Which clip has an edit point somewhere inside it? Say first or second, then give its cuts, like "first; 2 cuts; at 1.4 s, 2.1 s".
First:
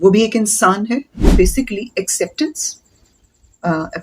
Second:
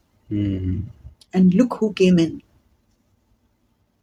first; 1 cut; at 1.2 s